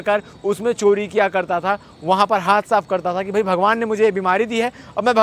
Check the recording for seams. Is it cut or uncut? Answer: uncut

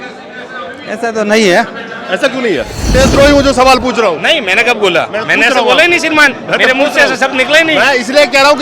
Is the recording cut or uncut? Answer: cut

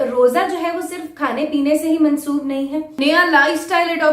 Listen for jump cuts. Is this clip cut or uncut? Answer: cut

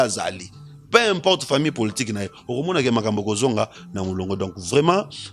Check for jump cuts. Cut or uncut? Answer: uncut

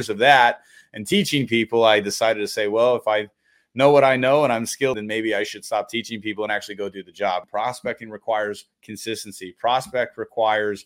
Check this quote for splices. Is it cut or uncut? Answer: cut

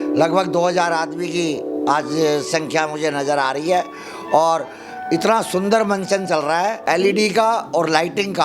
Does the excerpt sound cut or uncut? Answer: cut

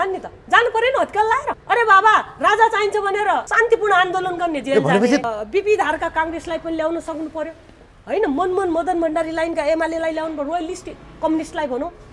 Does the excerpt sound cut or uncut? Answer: cut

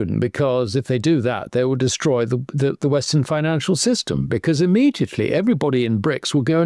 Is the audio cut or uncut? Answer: uncut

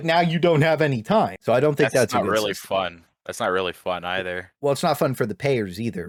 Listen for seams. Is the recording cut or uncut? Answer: uncut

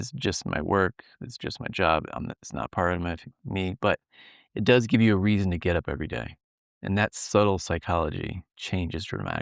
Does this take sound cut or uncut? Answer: uncut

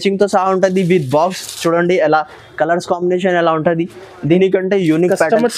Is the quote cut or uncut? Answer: cut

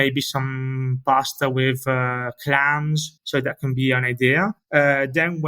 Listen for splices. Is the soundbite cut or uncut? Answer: cut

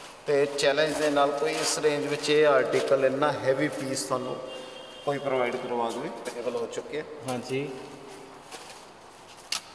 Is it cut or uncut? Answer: cut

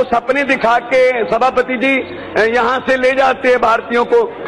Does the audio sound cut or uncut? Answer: uncut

